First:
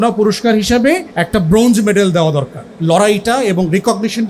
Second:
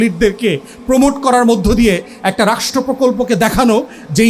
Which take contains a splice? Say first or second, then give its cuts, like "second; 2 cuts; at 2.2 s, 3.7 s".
first; 2 cuts; at 1.1 s, 2.6 s